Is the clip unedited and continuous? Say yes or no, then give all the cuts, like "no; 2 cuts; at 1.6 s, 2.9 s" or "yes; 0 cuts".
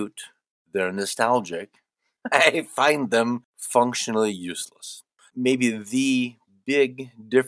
no; 2 cuts; at 3.5 s, 5.2 s